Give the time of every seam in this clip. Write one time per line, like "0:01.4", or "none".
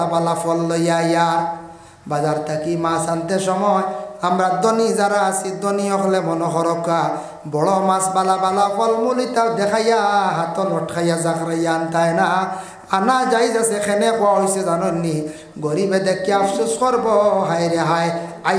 none

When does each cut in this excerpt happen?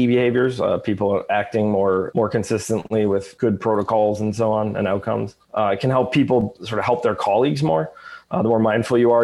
0:05.4
0:06.6

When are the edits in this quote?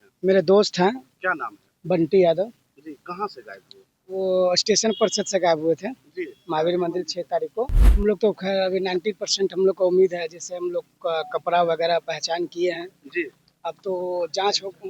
0:07.8

